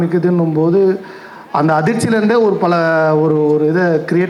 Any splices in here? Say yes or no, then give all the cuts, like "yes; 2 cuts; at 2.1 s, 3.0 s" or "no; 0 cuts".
no; 0 cuts